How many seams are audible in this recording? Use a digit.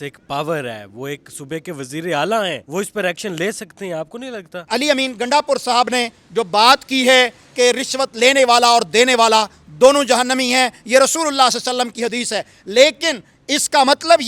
2